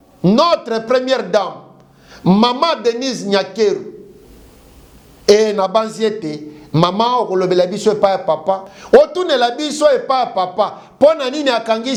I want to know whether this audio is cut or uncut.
uncut